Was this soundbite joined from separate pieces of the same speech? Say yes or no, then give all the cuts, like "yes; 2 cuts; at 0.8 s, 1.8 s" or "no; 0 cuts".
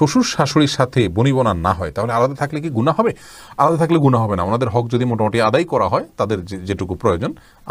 no; 0 cuts